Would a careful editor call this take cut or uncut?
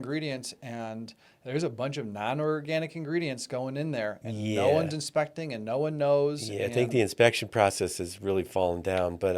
uncut